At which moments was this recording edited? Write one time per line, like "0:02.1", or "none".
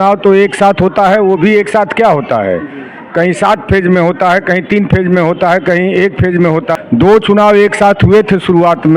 0:06.7